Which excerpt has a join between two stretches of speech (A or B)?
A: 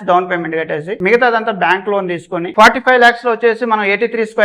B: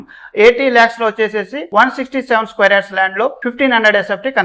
A